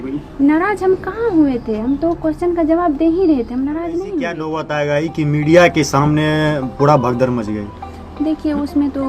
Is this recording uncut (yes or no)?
no